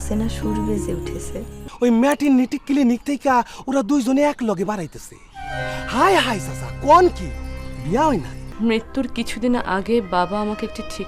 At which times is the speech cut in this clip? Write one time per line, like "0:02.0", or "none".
0:01.6
0:08.4